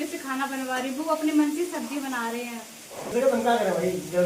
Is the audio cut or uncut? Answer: cut